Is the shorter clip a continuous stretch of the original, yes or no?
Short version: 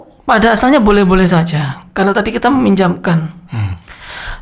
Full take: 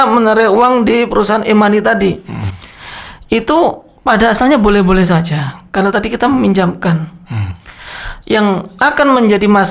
yes